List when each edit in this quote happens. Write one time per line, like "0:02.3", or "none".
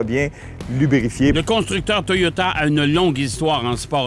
0:01.3